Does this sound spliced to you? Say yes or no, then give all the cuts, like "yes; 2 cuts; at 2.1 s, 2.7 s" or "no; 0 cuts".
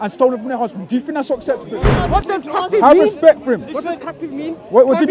yes; 1 cut; at 1.9 s